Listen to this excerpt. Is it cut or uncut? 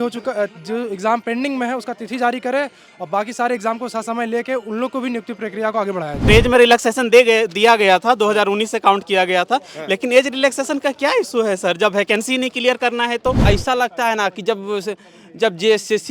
cut